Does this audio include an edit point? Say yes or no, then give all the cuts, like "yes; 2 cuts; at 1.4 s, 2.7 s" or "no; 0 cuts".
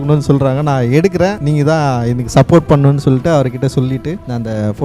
no; 0 cuts